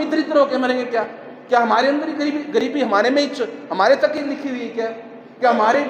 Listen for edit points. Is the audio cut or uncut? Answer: uncut